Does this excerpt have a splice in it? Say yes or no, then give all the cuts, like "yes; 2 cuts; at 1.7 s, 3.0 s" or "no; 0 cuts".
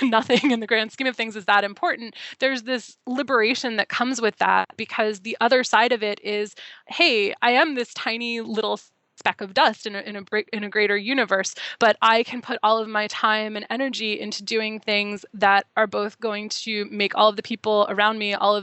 yes; 1 cut; at 4.8 s